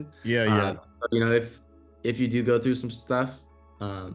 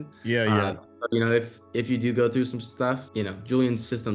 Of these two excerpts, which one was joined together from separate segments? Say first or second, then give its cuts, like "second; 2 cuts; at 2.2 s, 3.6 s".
second; 2 cuts; at 1.6 s, 3.1 s